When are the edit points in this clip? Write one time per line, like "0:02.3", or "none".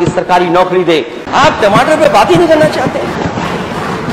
0:01.3